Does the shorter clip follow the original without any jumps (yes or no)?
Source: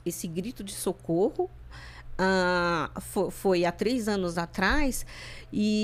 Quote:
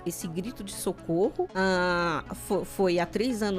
no